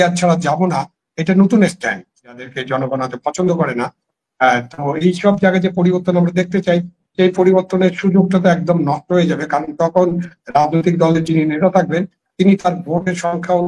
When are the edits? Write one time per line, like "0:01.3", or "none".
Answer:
0:02.4